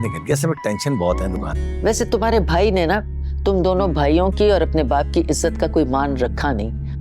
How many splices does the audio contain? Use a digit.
1